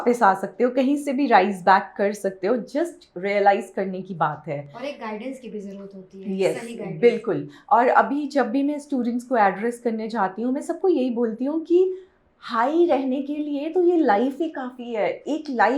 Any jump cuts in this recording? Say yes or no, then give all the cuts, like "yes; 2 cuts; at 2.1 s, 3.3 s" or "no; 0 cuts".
no; 0 cuts